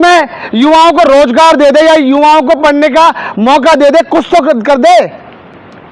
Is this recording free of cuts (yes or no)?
yes